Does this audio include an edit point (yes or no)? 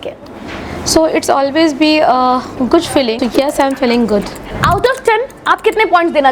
yes